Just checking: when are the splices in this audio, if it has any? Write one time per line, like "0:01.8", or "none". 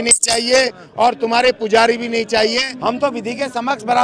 0:02.7